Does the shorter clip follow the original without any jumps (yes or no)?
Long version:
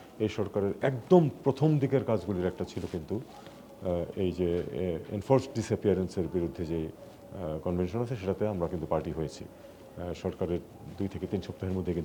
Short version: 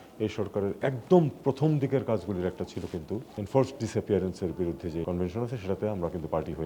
no